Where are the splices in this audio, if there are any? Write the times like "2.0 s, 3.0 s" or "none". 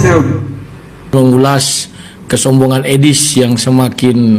1.1 s